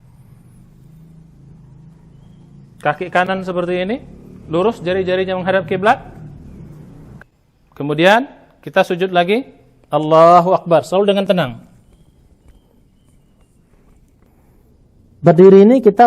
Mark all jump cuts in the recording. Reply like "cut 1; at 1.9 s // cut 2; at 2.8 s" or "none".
cut 1; at 7.1 s // cut 2; at 14.3 s